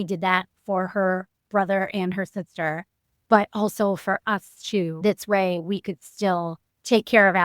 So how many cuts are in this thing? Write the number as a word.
one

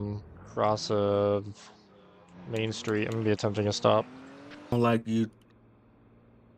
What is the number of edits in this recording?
one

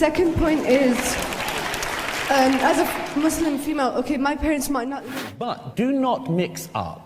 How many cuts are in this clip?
one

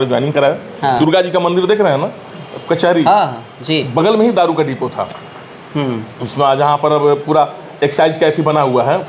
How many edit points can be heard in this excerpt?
one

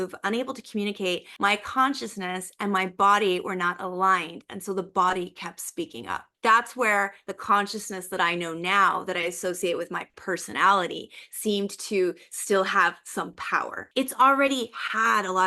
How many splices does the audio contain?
three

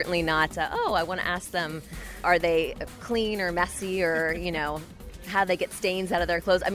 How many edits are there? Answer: one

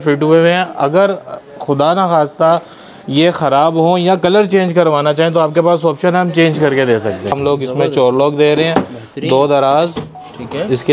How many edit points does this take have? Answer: one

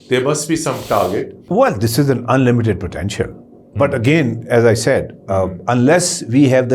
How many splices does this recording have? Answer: one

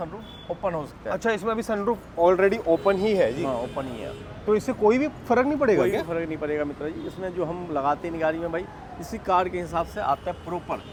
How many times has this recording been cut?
zero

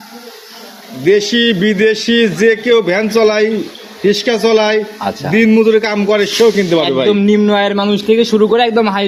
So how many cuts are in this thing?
zero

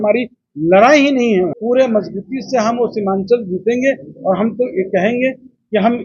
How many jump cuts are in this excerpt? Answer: one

